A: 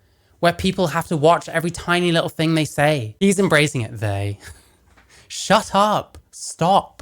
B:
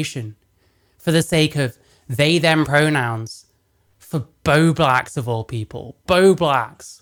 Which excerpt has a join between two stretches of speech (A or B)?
A